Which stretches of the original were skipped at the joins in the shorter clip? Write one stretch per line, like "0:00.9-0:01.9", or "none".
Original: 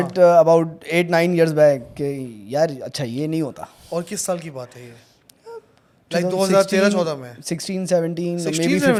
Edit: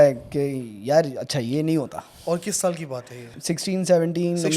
0:05.0-0:07.3